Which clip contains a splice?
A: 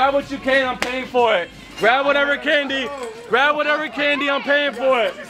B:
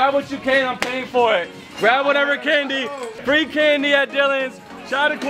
B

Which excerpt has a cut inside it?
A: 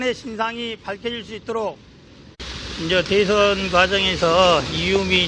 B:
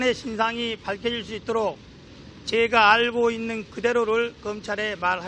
B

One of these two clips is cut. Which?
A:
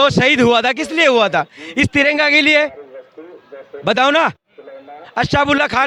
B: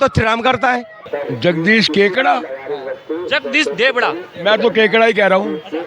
B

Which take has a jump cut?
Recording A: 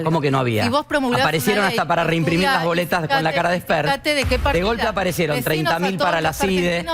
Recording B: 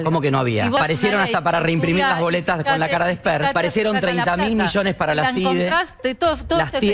B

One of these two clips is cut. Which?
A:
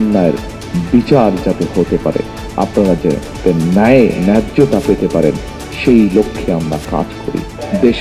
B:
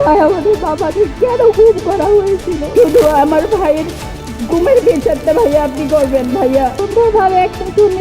B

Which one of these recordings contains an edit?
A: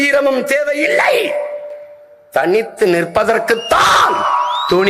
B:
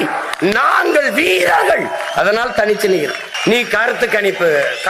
B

